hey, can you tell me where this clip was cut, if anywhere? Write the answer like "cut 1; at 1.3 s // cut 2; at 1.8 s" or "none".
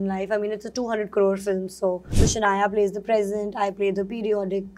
cut 1; at 2.1 s